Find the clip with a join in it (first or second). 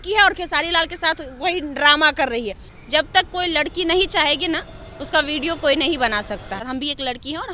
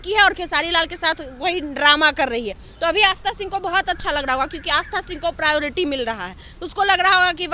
first